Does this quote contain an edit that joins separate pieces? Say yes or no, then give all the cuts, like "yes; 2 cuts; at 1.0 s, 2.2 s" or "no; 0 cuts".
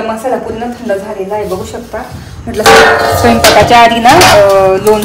no; 0 cuts